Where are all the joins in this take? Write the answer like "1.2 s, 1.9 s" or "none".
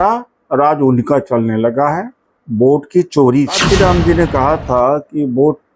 3.6 s